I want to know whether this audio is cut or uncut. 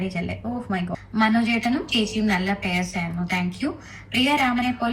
cut